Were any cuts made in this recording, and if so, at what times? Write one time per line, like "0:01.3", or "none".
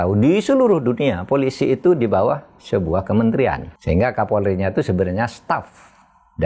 0:03.7